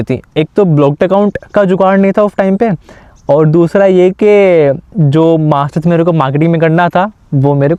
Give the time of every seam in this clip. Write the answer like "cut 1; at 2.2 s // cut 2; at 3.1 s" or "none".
none